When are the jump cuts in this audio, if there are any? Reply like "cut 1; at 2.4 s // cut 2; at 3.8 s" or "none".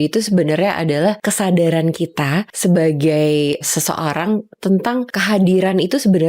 cut 1; at 1.2 s // cut 2; at 2.5 s // cut 3; at 3.7 s // cut 4; at 5.1 s